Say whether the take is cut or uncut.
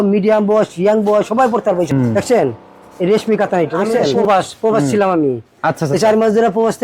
cut